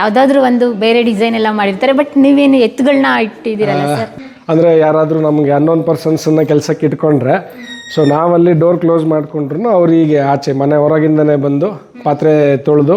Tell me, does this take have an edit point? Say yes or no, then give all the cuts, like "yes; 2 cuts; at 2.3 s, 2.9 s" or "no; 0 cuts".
yes; 1 cut; at 4.1 s